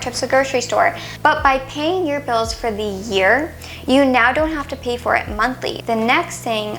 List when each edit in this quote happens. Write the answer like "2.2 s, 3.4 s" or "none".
1.0 s, 5.8 s